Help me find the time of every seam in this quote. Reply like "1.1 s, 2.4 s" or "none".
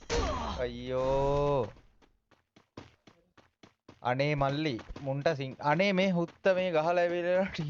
none